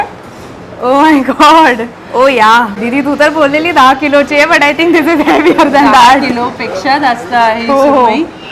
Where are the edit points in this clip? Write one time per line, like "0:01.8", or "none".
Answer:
0:02.7

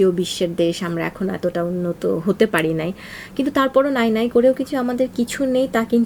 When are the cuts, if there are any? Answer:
none

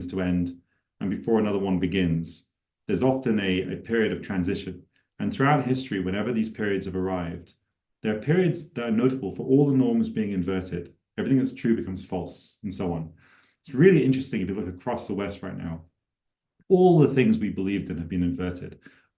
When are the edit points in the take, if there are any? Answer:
none

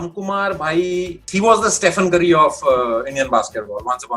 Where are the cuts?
0:01.3

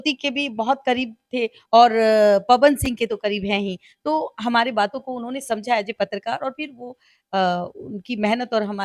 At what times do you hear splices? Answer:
none

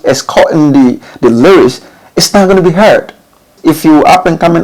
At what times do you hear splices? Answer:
0:03.5

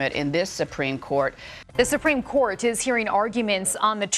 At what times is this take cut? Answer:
0:01.5

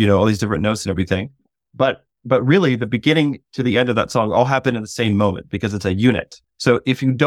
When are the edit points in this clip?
0:06.4

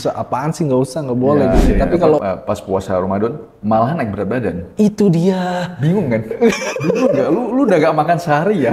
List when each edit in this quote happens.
0:02.2

